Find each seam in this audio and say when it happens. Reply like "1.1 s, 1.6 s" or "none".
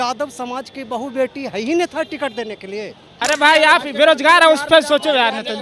3.1 s